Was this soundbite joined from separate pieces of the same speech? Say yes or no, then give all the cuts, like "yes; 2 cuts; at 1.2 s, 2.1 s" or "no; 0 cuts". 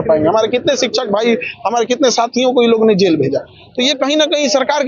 no; 0 cuts